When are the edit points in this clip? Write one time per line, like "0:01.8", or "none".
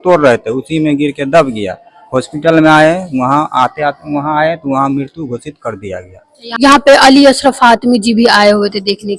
0:06.5